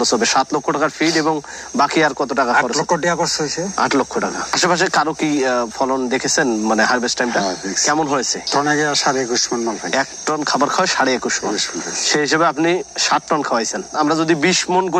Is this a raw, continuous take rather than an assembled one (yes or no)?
yes